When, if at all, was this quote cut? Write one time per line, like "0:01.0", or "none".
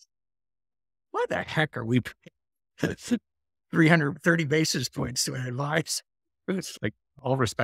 0:06.7